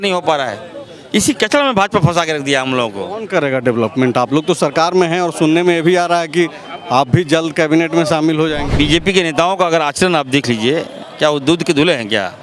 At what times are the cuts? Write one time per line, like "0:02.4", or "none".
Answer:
0:08.7